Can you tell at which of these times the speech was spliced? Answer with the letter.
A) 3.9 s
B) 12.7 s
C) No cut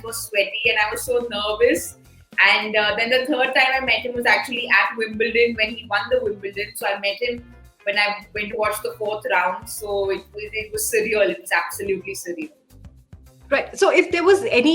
C